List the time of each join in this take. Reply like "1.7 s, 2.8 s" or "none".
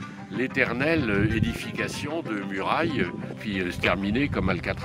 3.4 s